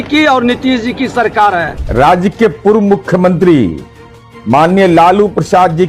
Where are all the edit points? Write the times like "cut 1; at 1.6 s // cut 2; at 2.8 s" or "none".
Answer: cut 1; at 1.7 s